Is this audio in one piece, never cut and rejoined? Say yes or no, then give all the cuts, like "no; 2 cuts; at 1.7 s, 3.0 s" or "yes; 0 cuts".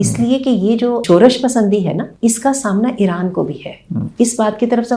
no; 2 cuts; at 1.0 s, 2.1 s